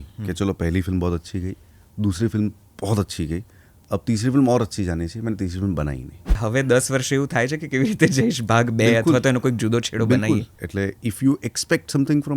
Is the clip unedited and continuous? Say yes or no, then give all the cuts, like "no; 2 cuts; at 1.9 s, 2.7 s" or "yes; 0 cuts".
no; 2 cuts; at 6.4 s, 10.5 s